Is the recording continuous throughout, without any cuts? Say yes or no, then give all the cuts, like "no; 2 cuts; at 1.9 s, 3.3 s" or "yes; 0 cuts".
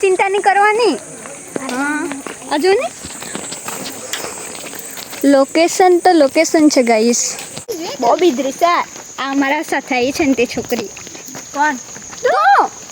yes; 0 cuts